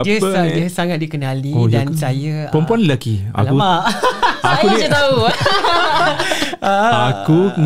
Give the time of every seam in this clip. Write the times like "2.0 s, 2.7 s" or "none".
none